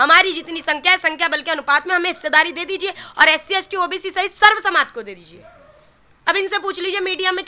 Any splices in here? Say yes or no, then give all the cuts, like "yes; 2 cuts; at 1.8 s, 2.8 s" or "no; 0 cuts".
no; 0 cuts